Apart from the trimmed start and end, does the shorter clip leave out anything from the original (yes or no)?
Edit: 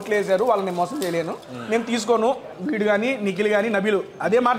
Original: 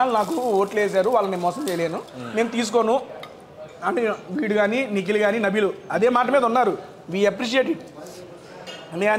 yes